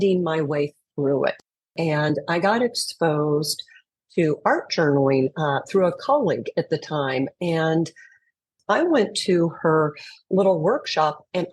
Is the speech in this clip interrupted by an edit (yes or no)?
yes